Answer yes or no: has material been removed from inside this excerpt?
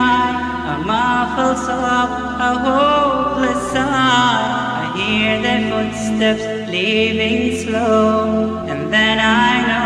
no